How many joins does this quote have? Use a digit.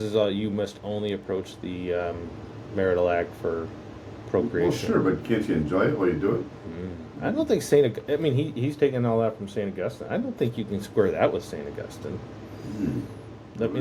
0